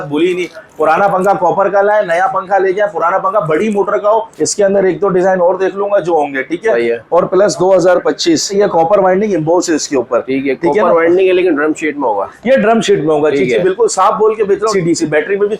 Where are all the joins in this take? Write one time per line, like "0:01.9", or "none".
0:04.3
0:08.5
0:14.7